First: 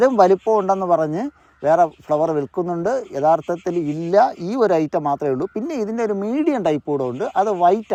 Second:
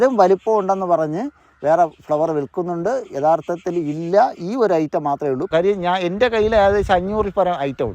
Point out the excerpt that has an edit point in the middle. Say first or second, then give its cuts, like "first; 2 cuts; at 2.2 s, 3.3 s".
second; 1 cut; at 5.5 s